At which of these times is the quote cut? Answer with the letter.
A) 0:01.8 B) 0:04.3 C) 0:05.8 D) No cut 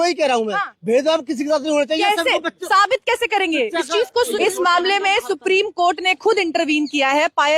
B